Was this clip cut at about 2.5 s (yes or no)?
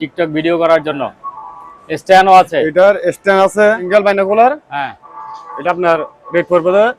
no